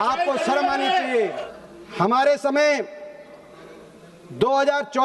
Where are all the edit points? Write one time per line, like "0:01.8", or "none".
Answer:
0:01.5